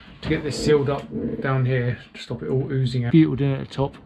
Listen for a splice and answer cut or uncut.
cut